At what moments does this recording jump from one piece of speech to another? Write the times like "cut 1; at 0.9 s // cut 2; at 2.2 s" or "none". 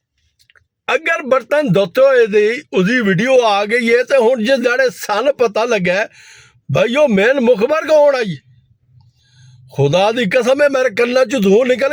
none